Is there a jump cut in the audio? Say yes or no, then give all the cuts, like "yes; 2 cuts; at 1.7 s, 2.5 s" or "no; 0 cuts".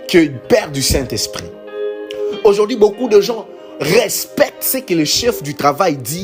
no; 0 cuts